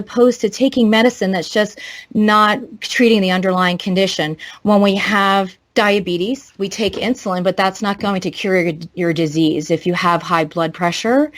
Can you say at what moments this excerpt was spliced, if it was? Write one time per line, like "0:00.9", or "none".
0:05.6